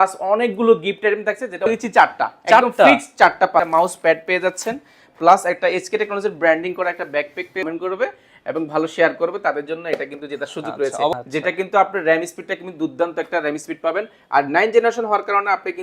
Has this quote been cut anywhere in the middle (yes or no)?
yes